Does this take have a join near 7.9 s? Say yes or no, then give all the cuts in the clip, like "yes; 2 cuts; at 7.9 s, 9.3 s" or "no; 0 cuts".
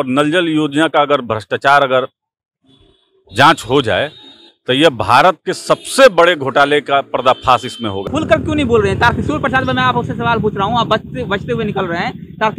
yes; 1 cut; at 7.9 s